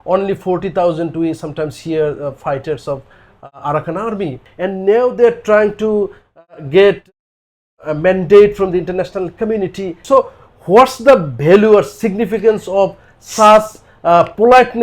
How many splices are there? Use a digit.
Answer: 2